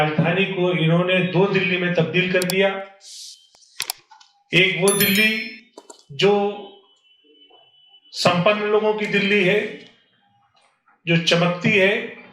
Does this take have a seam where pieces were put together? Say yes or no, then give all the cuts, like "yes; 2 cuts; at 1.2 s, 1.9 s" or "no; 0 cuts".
no; 0 cuts